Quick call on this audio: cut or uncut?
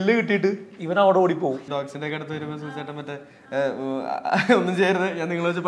cut